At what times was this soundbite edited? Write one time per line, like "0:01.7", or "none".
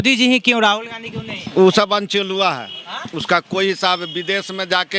0:01.4